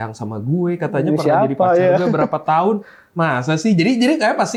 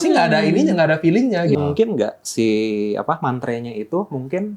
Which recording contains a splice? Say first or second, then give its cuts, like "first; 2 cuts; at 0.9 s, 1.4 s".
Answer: second; 1 cut; at 1.6 s